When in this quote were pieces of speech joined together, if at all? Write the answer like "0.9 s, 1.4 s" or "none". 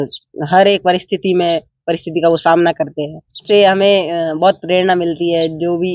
3.4 s